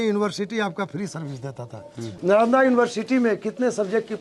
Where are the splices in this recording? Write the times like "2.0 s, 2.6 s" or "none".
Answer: 2.2 s